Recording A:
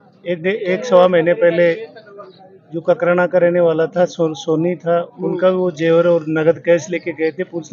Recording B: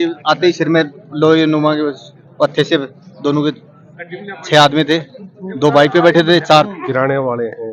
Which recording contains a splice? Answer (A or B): B